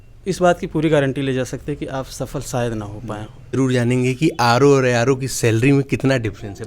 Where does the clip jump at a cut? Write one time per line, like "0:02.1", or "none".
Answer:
0:03.6